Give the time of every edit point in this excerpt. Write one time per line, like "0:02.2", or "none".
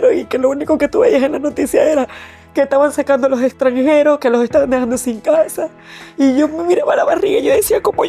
none